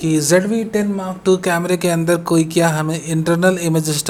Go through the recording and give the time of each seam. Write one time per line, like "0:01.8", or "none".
none